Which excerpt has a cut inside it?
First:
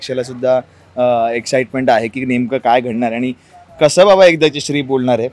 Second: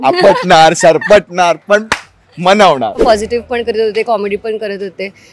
second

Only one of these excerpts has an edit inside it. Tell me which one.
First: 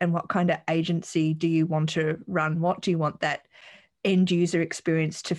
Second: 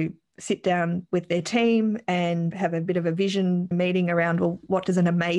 second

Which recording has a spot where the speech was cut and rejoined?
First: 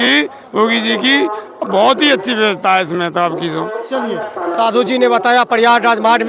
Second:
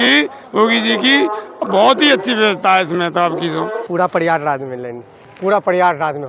second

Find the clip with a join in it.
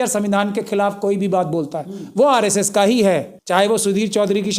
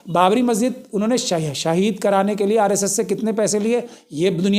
first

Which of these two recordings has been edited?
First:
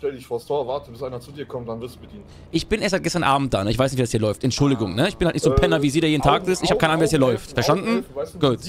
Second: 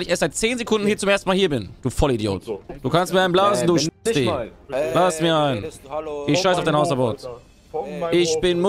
second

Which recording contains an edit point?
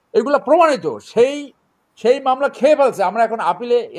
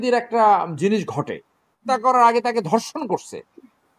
second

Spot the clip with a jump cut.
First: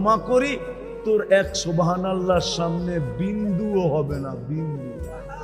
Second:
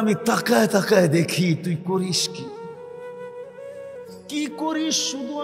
second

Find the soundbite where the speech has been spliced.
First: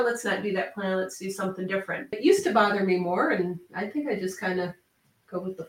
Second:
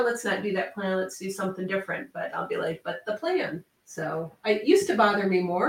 first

